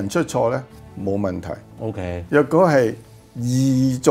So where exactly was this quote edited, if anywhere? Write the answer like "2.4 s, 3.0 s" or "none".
none